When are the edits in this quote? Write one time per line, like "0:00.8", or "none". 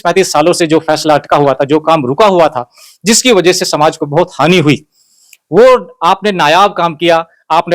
none